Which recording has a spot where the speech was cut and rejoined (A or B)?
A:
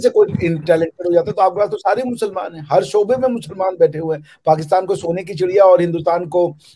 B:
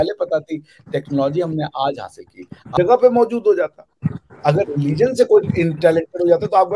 B